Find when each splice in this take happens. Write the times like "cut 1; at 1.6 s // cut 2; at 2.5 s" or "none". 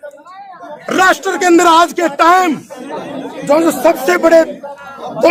none